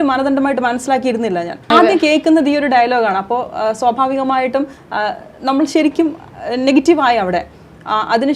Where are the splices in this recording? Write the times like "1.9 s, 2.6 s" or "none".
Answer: 1.7 s